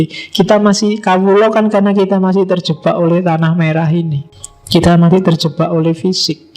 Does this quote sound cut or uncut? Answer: cut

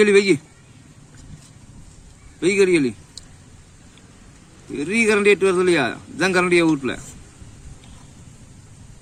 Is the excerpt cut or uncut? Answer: uncut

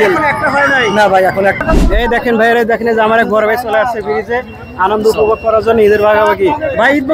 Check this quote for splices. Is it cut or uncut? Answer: cut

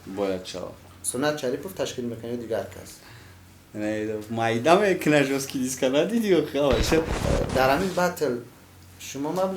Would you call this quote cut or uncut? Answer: cut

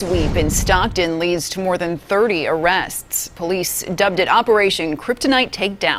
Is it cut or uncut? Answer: uncut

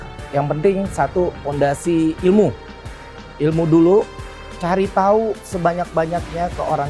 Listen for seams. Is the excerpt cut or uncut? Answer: uncut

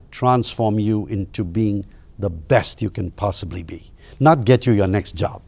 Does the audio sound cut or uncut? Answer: uncut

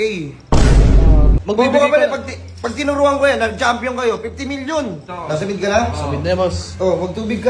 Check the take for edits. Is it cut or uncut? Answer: cut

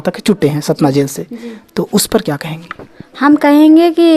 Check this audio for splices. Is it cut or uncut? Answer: uncut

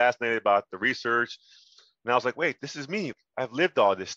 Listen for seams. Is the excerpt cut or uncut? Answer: cut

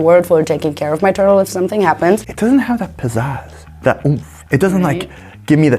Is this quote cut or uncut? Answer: cut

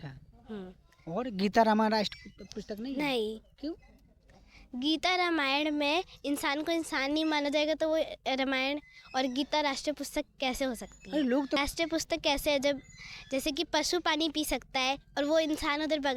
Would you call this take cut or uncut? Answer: cut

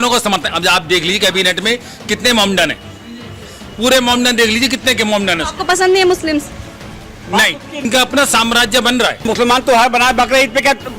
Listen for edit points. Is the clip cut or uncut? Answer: cut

